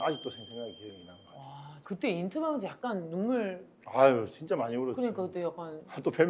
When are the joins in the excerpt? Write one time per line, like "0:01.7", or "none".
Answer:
0:01.8